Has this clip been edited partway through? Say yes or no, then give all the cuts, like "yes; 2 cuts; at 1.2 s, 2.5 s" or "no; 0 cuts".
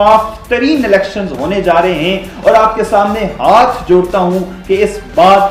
no; 0 cuts